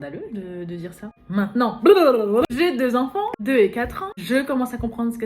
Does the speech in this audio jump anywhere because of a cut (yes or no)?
yes